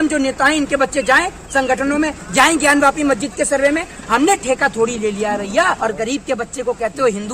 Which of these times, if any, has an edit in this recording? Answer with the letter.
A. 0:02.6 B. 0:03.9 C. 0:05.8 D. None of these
C